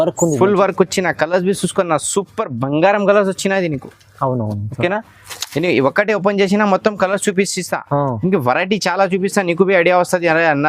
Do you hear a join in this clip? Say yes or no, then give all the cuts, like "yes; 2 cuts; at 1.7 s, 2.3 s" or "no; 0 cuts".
no; 0 cuts